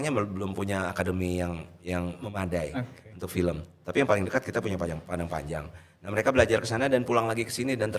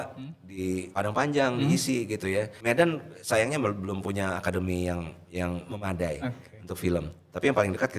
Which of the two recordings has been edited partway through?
second; 2 cuts; at 0.9 s, 2.5 s

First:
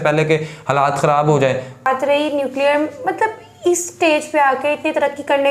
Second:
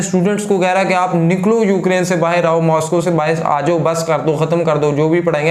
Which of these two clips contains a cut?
first; 1 cut; at 1.9 s

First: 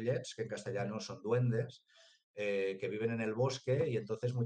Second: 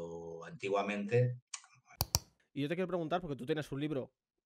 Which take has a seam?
second; 1 cut; at 2.1 s

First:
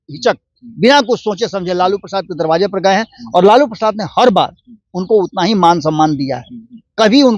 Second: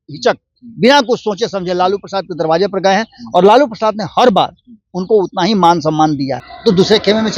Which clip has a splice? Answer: second; 1 cut; at 6.4 s

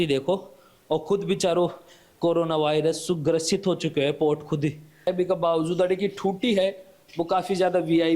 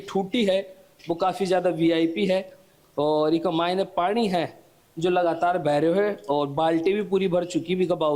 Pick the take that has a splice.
first; 1 cut; at 5.1 s

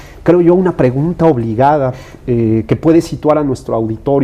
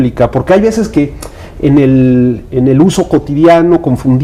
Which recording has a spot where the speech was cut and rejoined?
first; 1 cut; at 1.1 s

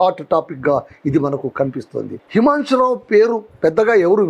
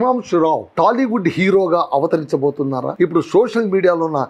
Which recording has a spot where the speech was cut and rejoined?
first; 1 cut; at 2.2 s

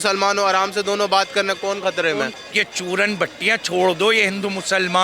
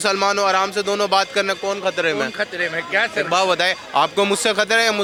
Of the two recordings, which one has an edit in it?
first; 1 cut; at 2.3 s

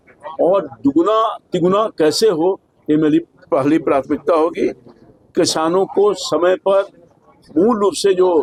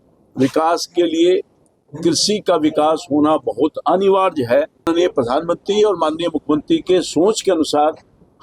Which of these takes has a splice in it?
second; 1 cut; at 4.9 s

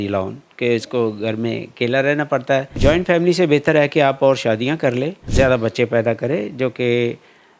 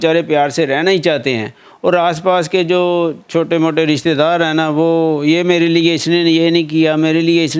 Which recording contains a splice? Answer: first; 2 cuts; at 2.7 s, 5.2 s

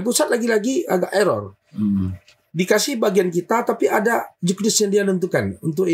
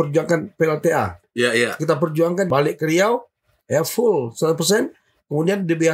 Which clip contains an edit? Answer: second; 2 cuts; at 1.2 s, 2.5 s

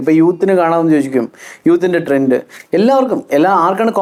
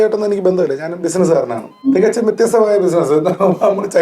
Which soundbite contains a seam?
second; 1 cut; at 1.7 s

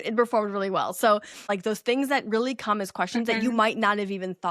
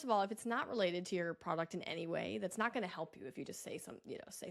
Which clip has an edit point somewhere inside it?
first; 1 cut; at 1.5 s

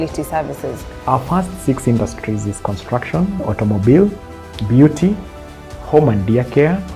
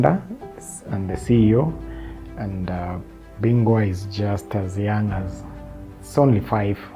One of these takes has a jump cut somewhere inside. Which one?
second; 2 cuts; at 3.2 s, 4.1 s

